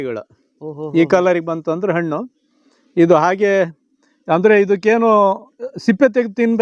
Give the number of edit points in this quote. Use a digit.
0